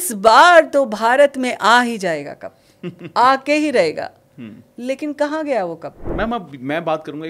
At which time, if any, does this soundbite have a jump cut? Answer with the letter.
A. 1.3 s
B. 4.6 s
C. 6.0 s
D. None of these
C